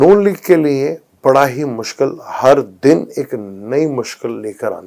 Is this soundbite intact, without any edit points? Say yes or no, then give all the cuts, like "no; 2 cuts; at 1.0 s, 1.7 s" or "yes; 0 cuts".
yes; 0 cuts